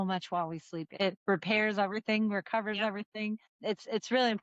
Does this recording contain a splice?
yes; 2 cuts; at 0.9 s, 3.5 s

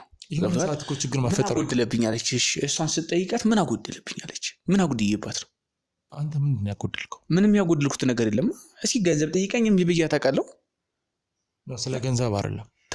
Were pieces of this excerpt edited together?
no; 0 cuts

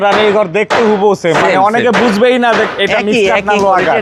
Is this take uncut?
yes; 0 cuts

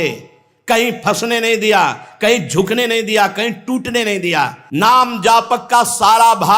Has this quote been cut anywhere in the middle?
yes; 1 cut; at 4.6 s

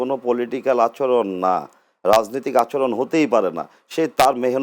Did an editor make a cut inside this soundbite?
no; 0 cuts

